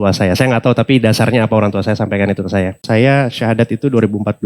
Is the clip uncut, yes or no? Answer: no